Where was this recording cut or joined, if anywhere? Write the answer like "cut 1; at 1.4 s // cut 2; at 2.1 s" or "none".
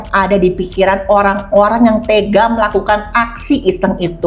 none